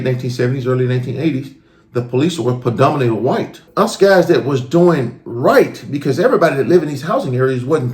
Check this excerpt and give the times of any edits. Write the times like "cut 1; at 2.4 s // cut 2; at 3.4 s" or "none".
cut 1; at 3.6 s